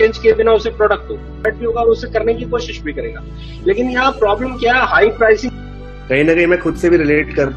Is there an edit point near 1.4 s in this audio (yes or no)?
yes